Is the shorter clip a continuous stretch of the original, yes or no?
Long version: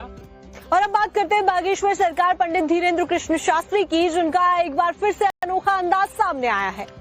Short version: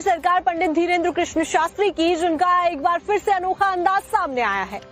no